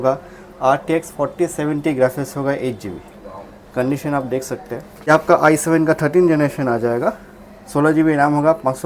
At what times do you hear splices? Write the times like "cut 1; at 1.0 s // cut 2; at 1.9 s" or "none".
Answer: cut 1; at 5.1 s